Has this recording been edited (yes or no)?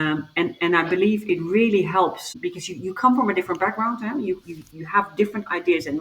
yes